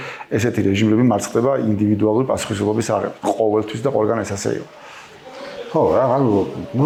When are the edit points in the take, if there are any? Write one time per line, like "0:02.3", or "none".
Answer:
none